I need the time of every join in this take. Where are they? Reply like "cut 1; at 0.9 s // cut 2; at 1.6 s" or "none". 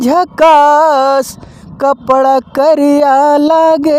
none